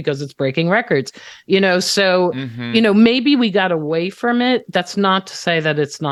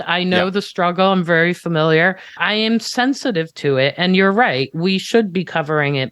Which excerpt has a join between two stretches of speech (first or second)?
second